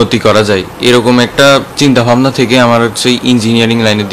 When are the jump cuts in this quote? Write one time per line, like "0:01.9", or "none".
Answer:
none